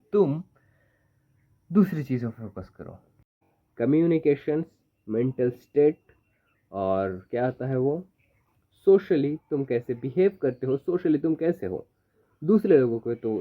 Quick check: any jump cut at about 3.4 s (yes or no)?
yes